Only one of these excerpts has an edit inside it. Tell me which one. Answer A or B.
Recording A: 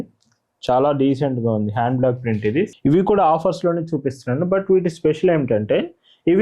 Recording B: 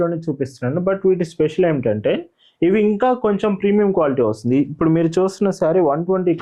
A